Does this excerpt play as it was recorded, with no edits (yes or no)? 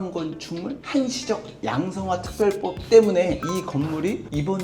no